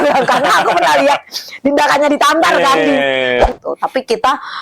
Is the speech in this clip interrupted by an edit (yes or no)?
yes